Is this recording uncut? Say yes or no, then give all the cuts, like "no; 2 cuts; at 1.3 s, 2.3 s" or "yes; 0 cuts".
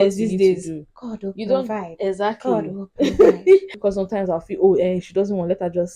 no; 1 cut; at 3.7 s